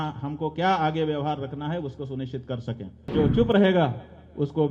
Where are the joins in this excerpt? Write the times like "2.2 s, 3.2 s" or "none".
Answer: 3.1 s